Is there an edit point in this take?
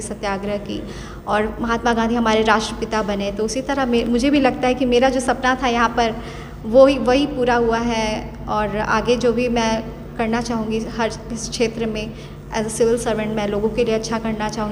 no; 0 cuts

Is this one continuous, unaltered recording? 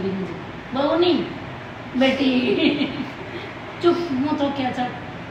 yes; 0 cuts

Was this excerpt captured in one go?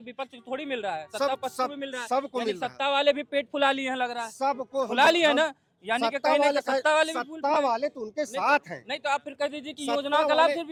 yes; 0 cuts

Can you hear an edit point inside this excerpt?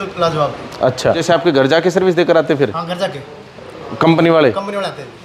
no; 0 cuts

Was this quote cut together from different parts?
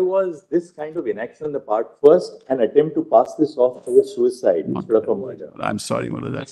no; 0 cuts

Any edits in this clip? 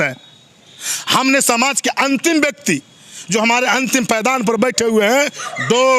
no; 0 cuts

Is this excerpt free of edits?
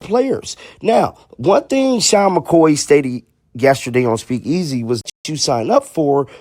no; 1 cut; at 5.1 s

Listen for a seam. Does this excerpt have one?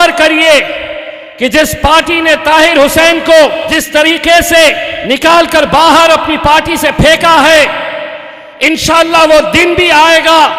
yes; 2 cuts; at 3.7 s, 4.9 s

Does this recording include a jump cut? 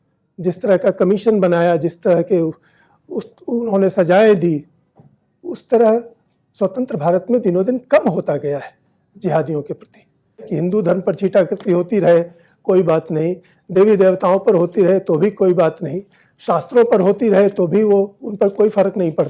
yes; 1 cut; at 10.5 s

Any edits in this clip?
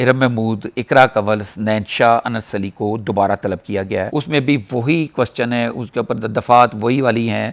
yes; 1 cut; at 4.1 s

